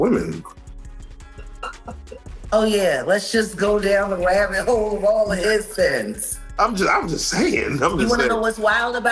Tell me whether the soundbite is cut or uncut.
uncut